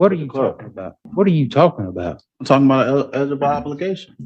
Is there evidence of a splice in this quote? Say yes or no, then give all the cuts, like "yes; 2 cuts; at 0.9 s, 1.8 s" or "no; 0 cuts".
yes; 1 cut; at 1.0 s